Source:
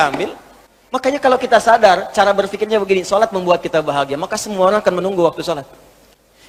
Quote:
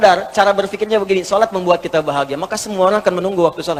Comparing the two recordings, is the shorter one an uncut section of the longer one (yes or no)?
yes